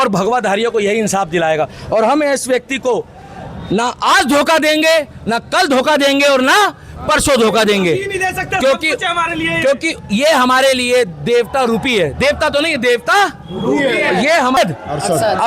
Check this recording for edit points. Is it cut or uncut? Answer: cut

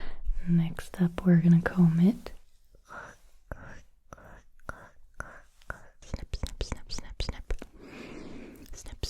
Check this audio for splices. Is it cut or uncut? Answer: cut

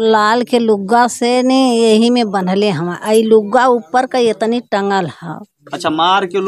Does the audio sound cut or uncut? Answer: uncut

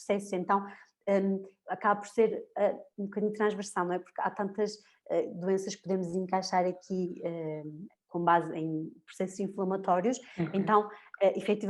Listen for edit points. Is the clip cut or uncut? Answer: uncut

